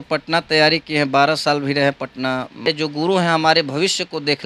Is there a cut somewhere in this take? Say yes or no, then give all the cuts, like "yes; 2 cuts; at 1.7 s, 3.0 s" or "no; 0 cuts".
yes; 1 cut; at 2.7 s